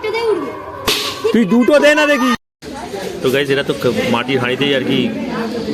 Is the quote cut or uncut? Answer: cut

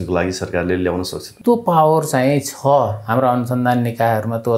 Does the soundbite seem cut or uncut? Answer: cut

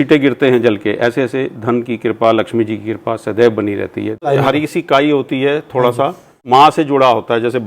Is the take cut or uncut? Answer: cut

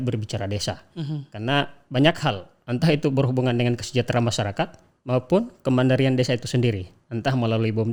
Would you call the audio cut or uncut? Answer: uncut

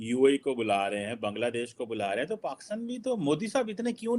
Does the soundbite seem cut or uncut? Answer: uncut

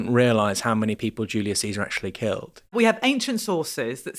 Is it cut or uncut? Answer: cut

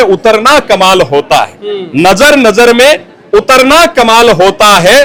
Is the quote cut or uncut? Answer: uncut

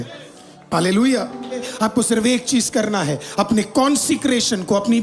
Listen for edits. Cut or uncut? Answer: cut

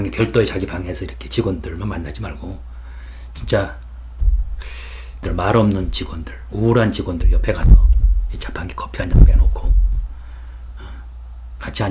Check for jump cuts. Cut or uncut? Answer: cut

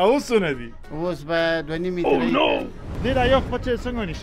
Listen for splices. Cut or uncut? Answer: cut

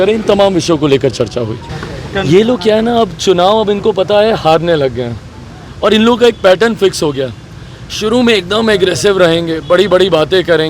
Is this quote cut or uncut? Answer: cut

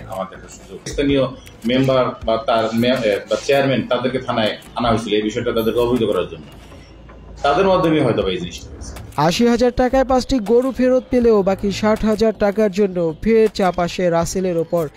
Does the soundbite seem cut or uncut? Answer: uncut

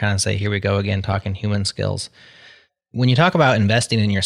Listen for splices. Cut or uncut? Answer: uncut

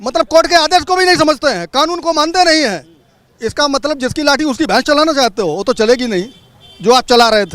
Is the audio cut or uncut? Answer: uncut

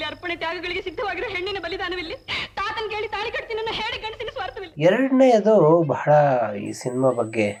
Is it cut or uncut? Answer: uncut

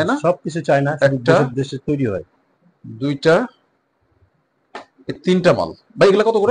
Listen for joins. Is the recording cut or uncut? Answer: uncut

